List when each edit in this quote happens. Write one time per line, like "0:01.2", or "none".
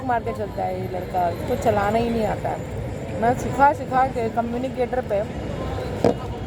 none